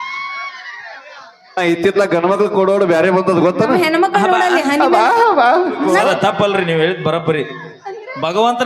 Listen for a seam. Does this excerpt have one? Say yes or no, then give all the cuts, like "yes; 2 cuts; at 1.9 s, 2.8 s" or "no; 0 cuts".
yes; 1 cut; at 5.9 s